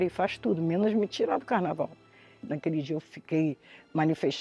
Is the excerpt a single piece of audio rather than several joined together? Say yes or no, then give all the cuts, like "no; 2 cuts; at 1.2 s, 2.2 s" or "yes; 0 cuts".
no; 1 cut; at 2.5 s